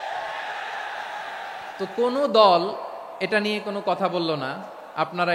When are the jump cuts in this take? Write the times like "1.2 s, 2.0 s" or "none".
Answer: 1.7 s